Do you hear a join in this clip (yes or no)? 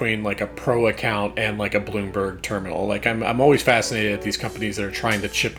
no